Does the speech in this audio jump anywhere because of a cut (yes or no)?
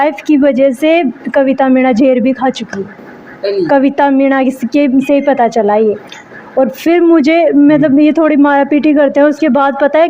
no